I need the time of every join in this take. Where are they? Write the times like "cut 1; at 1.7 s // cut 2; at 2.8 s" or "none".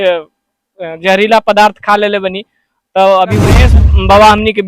cut 1; at 3.7 s